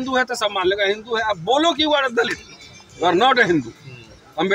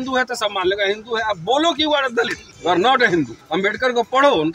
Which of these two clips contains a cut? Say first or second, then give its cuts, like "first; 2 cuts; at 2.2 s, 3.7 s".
second; 2 cuts; at 2.4 s, 3.4 s